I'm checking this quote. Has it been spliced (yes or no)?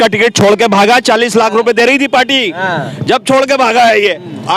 no